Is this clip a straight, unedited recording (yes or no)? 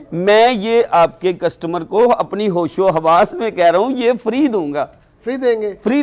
yes